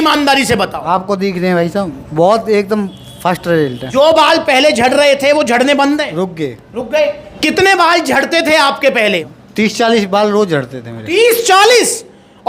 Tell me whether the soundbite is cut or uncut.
cut